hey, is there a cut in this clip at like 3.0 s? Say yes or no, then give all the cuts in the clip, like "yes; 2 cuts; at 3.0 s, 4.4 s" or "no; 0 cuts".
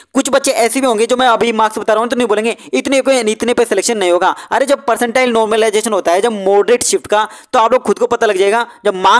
no; 0 cuts